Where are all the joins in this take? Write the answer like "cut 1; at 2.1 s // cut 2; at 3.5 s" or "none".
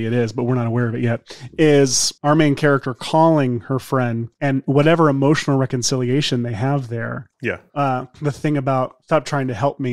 none